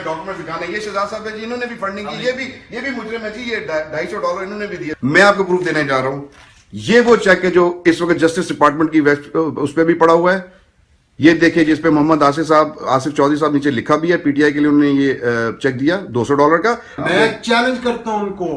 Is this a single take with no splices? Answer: no; 2 cuts; at 4.9 s, 16.9 s

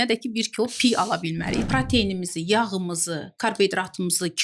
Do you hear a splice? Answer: yes; 1 cut; at 1.7 s

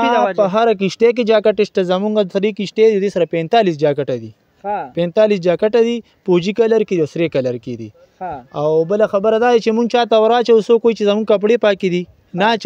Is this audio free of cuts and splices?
yes; 0 cuts

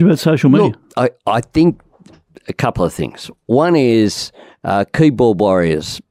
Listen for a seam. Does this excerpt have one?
no; 0 cuts

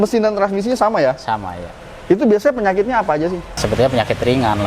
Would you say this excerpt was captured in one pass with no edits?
no; 1 cut; at 3.5 s

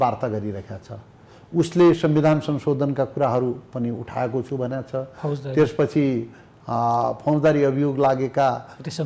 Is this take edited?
no; 0 cuts

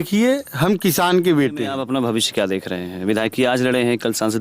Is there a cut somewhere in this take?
yes; 1 cut; at 1.8 s

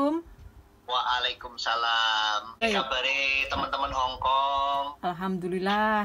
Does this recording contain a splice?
yes; 1 cut; at 2.6 s

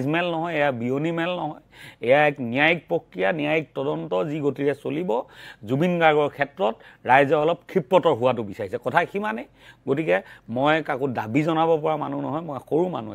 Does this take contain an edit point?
no; 0 cuts

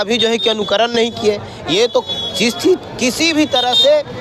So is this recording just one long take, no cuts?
yes; 0 cuts

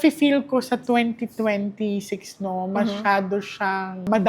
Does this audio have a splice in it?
no; 0 cuts

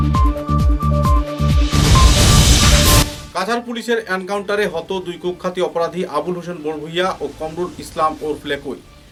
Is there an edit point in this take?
no; 0 cuts

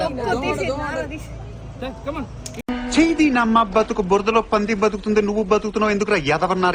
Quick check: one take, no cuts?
yes; 0 cuts

